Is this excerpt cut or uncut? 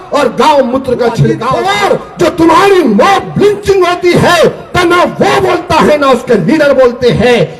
cut